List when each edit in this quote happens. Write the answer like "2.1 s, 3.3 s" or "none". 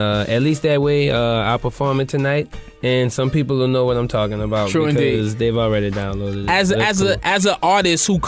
3.0 s